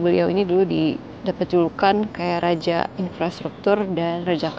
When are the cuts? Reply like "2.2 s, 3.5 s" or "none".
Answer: none